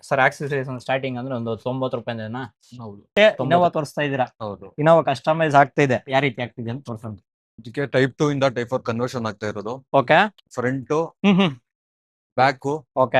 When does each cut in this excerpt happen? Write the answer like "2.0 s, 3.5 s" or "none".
3.1 s

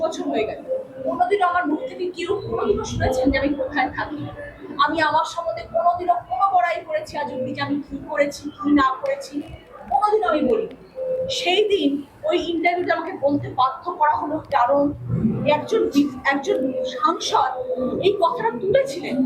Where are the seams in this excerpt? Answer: 1.2 s

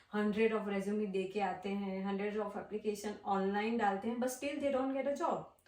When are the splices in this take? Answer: none

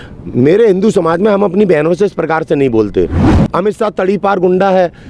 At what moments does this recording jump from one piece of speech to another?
3.3 s

